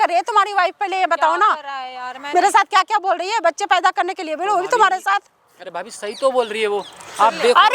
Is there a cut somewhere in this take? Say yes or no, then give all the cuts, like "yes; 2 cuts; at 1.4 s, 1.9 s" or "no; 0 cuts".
no; 0 cuts